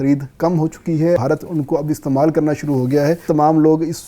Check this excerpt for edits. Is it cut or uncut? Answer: cut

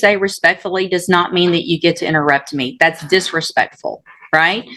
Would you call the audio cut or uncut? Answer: uncut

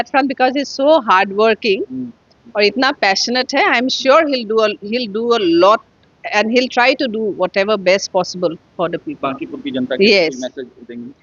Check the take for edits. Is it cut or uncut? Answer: uncut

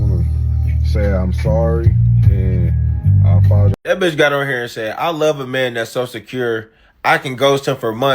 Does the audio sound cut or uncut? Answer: cut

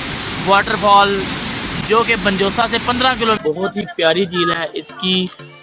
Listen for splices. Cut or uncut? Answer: cut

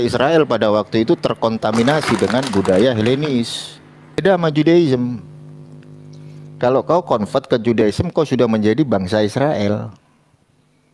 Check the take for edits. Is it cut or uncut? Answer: cut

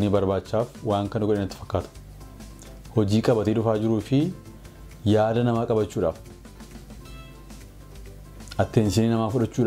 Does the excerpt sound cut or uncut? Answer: uncut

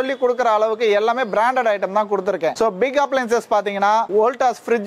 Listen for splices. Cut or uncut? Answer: uncut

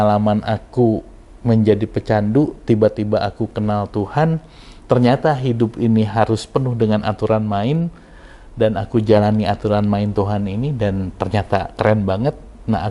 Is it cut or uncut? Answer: uncut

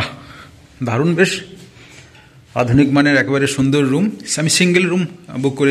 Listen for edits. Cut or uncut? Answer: uncut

